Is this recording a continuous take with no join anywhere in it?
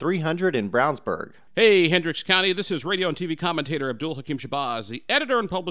no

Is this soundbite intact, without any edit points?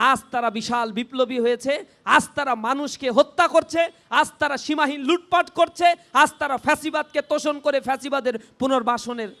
yes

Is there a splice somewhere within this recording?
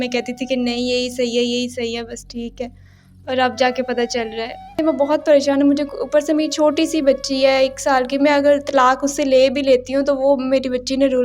yes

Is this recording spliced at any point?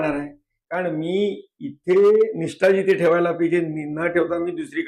no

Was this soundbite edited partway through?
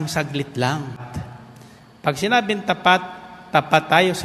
yes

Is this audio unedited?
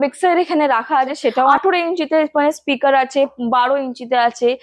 no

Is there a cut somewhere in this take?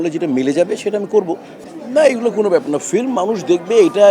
no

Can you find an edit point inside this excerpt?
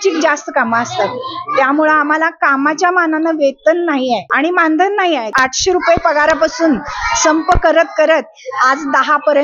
yes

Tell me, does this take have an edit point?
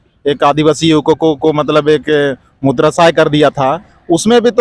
no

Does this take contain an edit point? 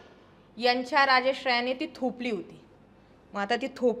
no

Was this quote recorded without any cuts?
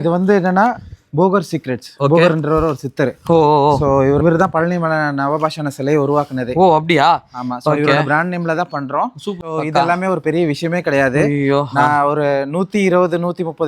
no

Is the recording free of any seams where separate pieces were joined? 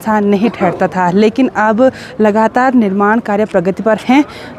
yes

